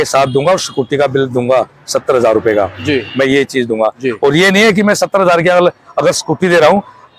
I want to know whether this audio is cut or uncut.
uncut